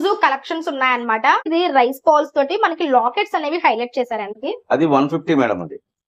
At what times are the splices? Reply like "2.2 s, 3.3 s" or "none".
1.5 s, 4.3 s